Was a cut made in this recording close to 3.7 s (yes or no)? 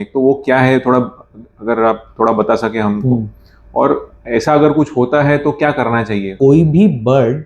no